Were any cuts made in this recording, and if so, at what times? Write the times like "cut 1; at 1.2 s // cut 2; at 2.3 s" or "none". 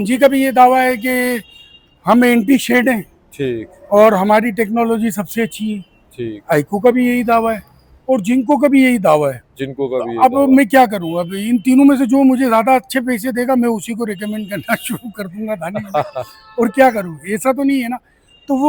none